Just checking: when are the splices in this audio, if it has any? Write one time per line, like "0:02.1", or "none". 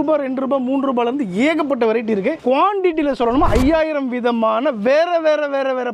0:02.4